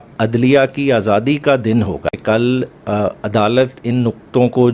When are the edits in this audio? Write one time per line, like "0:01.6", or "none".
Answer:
0:02.1

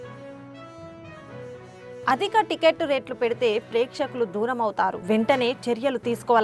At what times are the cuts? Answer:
0:02.0

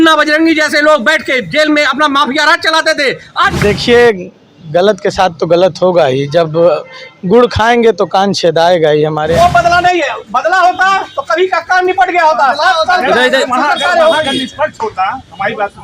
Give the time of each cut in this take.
0:03.3
0:09.3

